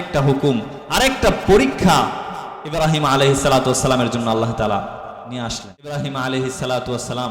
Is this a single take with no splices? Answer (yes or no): no